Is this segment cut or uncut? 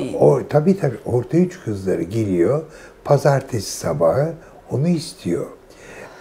uncut